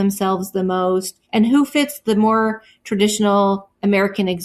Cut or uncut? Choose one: cut